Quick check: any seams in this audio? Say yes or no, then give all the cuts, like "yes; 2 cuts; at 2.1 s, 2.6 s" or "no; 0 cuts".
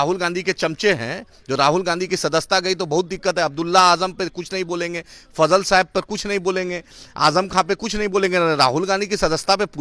no; 0 cuts